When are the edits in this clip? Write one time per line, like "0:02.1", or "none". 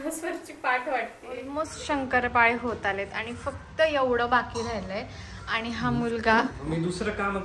0:01.5